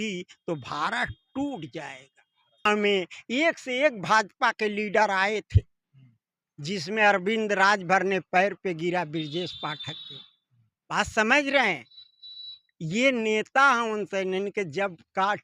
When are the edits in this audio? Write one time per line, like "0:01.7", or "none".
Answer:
0:02.7